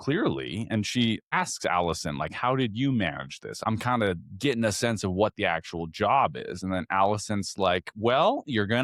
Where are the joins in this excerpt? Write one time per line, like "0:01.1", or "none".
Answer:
0:01.3
0:03.6